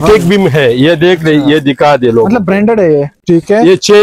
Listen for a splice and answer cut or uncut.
cut